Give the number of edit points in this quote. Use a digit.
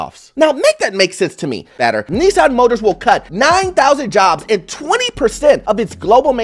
1